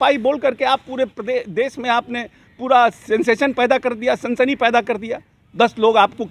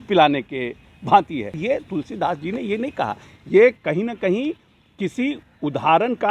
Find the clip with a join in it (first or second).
second